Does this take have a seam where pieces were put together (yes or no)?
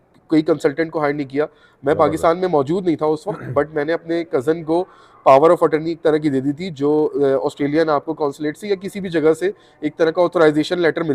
no